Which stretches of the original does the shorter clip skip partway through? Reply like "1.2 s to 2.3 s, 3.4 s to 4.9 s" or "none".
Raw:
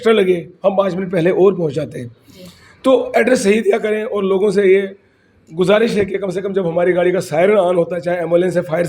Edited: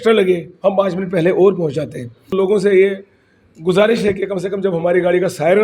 2.3 s to 4.2 s